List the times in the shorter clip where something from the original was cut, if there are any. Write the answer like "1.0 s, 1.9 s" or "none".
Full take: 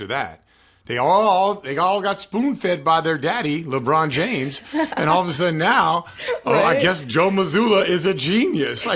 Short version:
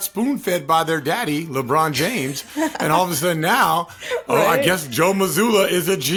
none